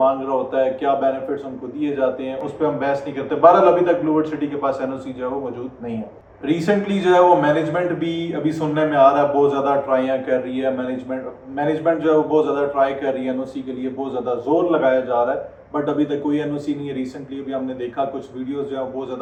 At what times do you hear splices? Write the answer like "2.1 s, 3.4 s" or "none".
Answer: none